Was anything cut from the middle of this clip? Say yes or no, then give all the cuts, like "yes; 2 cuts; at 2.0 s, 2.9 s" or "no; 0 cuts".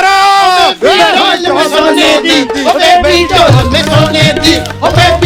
no; 0 cuts